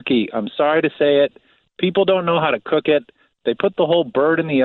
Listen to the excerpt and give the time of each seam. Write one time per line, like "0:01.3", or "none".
none